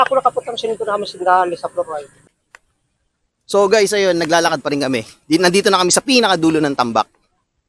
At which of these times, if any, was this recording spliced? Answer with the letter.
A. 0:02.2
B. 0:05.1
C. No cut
A